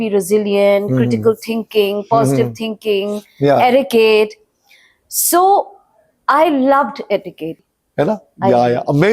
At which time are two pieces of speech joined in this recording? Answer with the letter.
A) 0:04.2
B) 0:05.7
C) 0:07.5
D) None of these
C